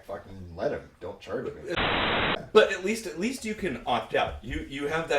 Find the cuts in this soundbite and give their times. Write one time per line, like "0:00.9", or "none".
0:02.0